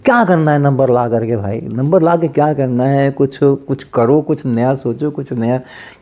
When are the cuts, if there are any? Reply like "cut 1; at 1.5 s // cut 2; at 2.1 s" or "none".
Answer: none